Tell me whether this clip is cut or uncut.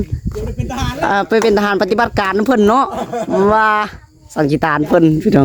uncut